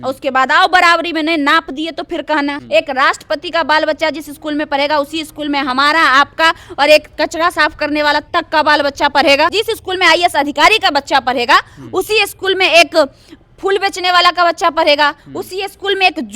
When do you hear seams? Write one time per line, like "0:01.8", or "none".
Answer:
0:02.6
0:09.5